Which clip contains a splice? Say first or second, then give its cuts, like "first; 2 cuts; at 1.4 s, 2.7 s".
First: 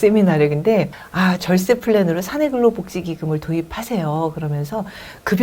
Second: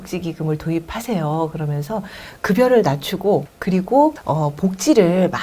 second; 2 cuts; at 3.5 s, 4.2 s